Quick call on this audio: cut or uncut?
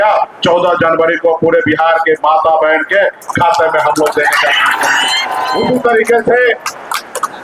cut